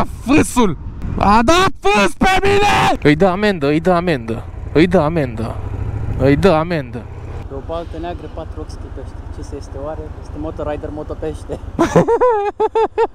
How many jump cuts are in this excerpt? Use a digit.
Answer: 2